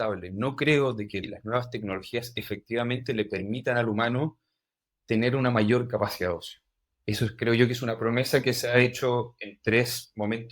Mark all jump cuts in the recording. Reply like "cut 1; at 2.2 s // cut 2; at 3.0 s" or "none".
cut 1; at 1.2 s